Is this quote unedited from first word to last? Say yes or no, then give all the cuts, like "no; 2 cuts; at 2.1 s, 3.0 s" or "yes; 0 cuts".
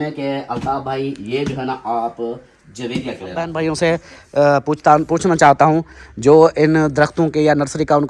no; 1 cut; at 3.5 s